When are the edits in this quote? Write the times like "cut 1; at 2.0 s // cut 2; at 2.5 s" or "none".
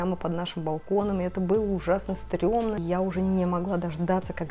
cut 1; at 2.8 s